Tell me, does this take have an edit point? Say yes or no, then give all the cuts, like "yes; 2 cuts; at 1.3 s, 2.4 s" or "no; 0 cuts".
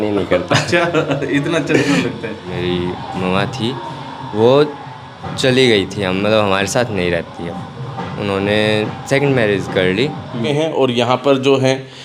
yes; 3 cuts; at 2.5 s, 7.5 s, 10.4 s